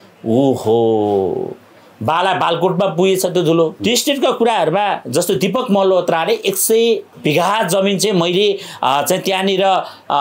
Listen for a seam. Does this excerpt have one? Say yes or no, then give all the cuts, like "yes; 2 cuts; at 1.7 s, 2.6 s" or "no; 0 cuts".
yes; 2 cuts; at 3.8 s, 7.1 s